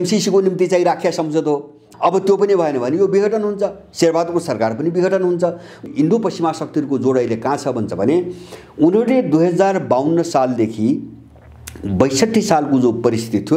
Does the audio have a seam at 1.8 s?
yes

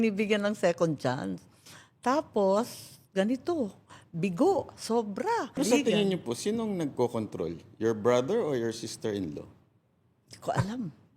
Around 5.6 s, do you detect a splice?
yes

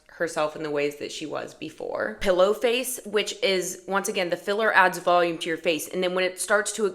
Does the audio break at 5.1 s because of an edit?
no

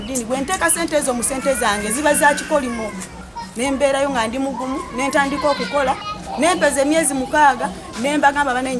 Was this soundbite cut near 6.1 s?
yes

